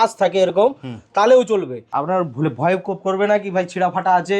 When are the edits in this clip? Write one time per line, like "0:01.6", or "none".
0:01.8